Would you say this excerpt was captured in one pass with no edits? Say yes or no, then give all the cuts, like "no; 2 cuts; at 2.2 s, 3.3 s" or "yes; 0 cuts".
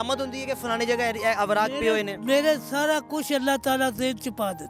yes; 0 cuts